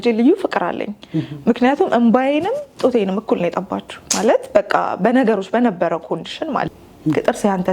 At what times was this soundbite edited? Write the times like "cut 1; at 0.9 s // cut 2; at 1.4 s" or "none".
cut 1; at 6.7 s

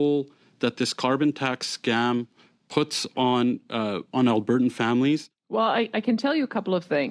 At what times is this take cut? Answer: cut 1; at 5.6 s

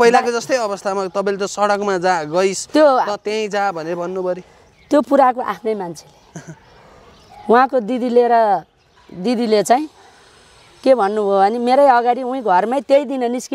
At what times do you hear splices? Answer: none

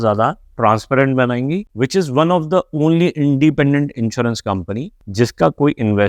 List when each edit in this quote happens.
cut 1; at 1.7 s

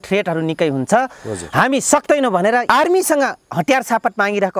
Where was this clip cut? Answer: cut 1; at 2.6 s

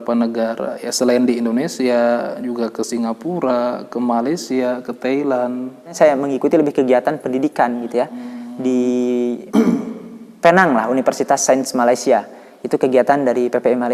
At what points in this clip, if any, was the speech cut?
cut 1; at 5.9 s

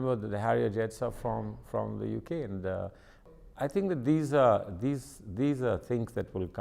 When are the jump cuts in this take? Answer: cut 1; at 3.3 s

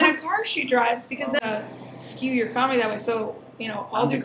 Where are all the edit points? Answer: cut 1; at 1.4 s

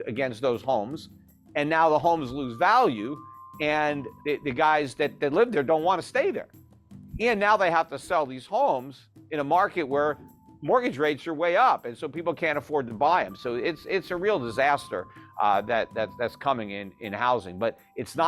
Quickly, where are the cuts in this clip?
cut 1; at 4.1 s

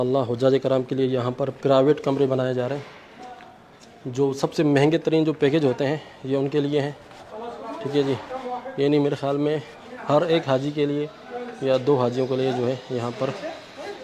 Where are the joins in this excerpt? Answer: none

